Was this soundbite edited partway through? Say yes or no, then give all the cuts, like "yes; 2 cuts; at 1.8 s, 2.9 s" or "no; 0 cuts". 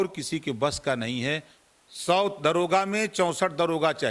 yes; 1 cut; at 1.6 s